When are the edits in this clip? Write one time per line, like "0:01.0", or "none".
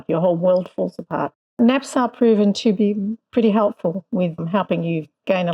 0:01.6
0:02.6
0:04.4

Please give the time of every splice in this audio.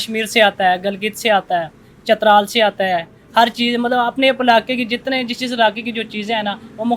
none

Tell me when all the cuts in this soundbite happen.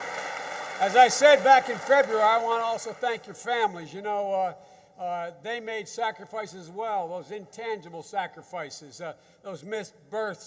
0:04.3

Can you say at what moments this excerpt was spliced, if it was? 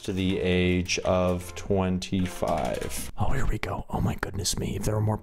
0:03.0

